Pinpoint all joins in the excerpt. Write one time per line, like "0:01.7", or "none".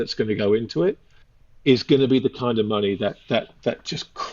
none